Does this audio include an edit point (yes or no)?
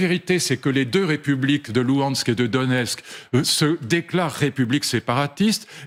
no